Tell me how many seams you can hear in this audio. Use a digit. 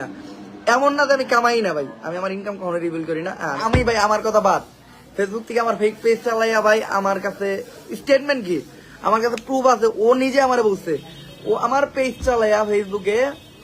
1